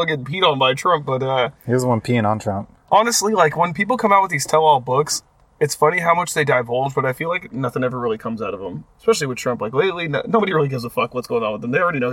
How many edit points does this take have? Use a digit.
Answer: 0